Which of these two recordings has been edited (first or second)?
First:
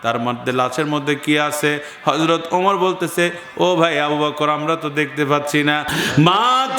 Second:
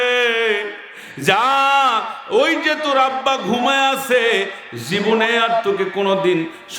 first